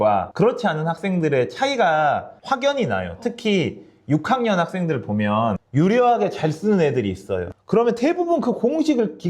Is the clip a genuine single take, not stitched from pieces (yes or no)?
yes